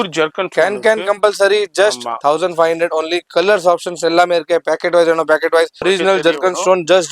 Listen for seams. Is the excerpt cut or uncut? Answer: cut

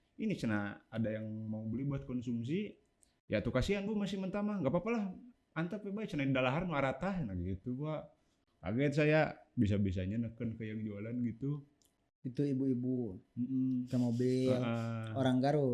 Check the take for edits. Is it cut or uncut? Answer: uncut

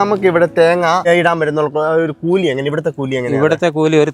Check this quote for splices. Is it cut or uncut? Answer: cut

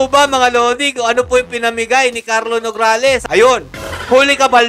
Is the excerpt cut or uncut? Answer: cut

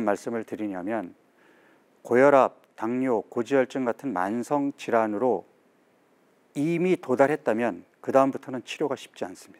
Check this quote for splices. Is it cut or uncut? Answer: uncut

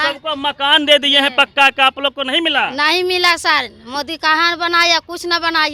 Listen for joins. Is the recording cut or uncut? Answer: uncut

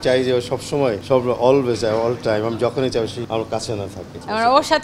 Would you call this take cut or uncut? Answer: cut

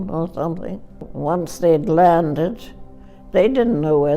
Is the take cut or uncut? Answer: cut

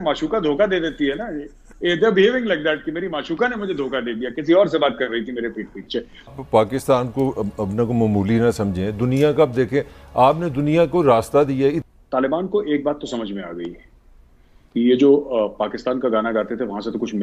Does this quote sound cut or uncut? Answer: cut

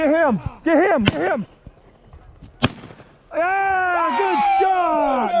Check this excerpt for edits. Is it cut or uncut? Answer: uncut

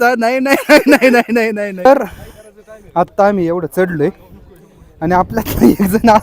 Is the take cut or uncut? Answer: cut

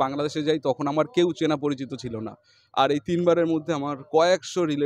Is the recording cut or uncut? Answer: uncut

